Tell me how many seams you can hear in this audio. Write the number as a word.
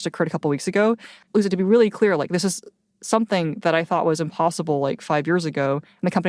one